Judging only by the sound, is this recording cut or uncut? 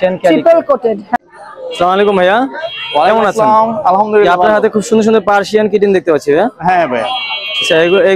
cut